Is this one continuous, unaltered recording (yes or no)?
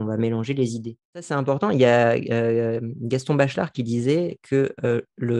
no